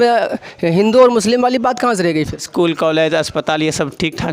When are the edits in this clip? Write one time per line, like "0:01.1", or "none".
0:02.5